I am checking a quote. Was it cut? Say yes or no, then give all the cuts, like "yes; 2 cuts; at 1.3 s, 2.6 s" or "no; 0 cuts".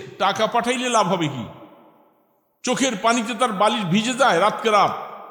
no; 0 cuts